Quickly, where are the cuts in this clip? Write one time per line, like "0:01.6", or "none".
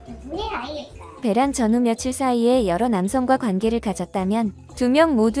0:01.2